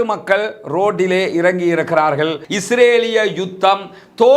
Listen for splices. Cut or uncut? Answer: cut